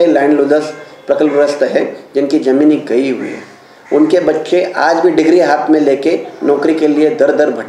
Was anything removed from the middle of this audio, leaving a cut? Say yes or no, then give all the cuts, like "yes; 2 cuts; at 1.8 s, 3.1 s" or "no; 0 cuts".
no; 0 cuts